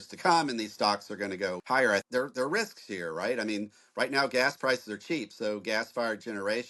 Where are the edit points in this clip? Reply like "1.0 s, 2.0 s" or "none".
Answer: 2.0 s